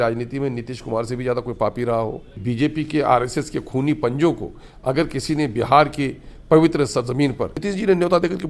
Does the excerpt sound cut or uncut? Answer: cut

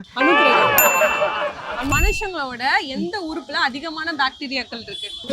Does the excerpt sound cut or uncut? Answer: cut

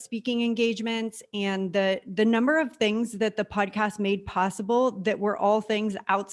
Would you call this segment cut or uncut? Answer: uncut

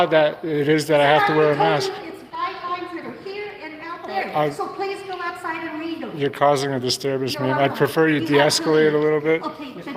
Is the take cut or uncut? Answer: uncut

